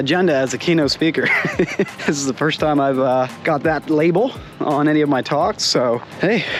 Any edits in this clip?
no; 0 cuts

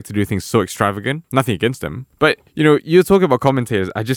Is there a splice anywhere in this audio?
yes; 1 cut; at 1.2 s

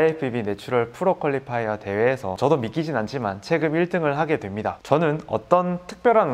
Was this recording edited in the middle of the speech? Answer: yes; 2 cuts; at 2.3 s, 4.8 s

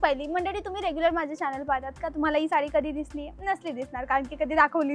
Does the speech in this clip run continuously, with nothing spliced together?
yes; 0 cuts

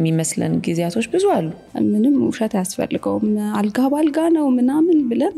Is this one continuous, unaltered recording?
no; 1 cut; at 1.7 s

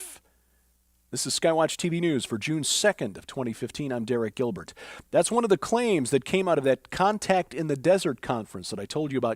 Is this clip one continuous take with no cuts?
no; 1 cut; at 2.7 s

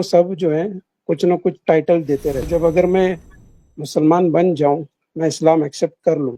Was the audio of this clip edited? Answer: yes; 1 cut; at 2.5 s

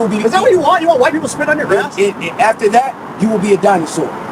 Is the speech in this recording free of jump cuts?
no; 2 cuts; at 1.3 s, 3.0 s

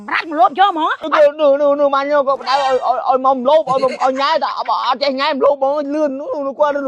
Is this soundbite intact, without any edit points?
no; 1 cut; at 1.0 s

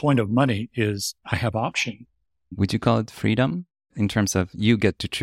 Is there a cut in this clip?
yes; 3 cuts; at 1.1 s, 2.5 s, 3.9 s

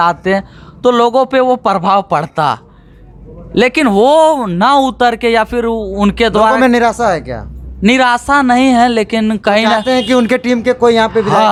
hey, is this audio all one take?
yes; 0 cuts

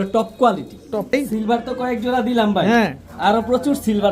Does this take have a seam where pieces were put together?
yes; 1 cut; at 1.1 s

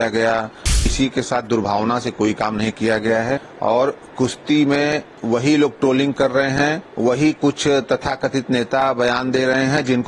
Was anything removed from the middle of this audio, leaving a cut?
yes; 4 cuts; at 0.9 s, 3.5 s, 5.1 s, 6.9 s

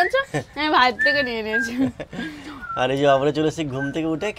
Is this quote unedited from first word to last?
yes; 0 cuts

